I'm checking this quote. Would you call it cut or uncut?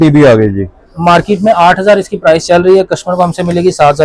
uncut